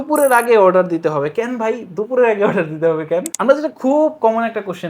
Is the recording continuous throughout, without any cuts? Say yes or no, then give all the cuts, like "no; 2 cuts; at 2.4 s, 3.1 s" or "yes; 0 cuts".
no; 1 cut; at 3.3 s